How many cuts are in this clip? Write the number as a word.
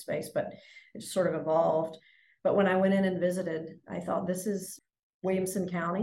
zero